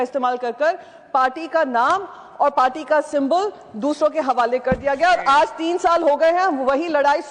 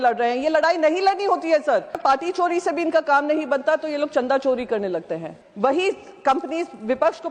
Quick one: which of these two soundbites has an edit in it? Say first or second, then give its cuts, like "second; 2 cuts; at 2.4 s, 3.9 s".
second; 2 cuts; at 2.0 s, 5.2 s